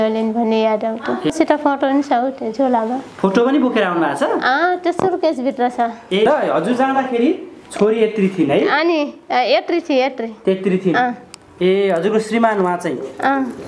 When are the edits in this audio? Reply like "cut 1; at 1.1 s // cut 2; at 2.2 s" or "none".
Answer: cut 1; at 1.3 s // cut 2; at 6.3 s